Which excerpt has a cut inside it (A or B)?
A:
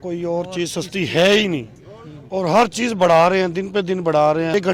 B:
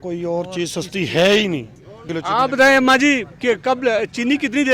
B